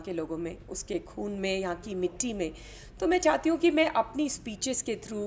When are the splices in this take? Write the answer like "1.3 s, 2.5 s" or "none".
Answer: none